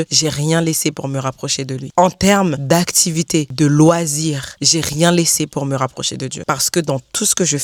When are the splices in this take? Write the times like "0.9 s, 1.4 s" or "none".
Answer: none